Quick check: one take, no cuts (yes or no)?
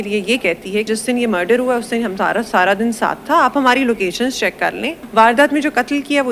no